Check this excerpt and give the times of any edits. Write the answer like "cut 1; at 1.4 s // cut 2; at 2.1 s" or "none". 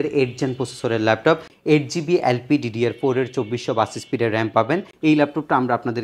cut 1; at 1.5 s // cut 2; at 4.9 s